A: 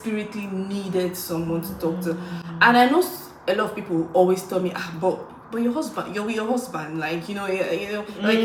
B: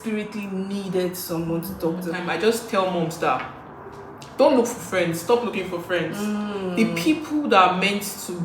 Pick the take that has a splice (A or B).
B